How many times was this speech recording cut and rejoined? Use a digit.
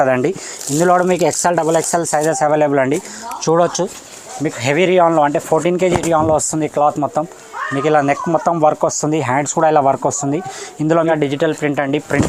1